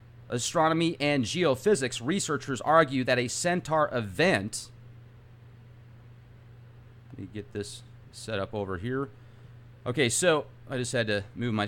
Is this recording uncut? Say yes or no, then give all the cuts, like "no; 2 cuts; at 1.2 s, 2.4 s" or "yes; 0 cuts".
yes; 0 cuts